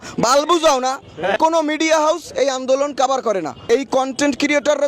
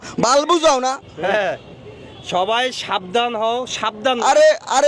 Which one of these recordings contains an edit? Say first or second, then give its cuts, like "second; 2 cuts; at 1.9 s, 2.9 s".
first; 2 cuts; at 1.4 s, 3.6 s